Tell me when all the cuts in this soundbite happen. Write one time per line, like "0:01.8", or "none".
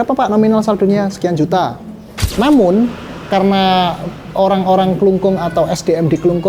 0:02.2